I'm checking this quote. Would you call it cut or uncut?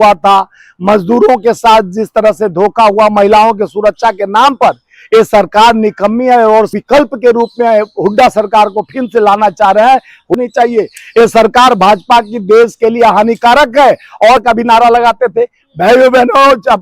cut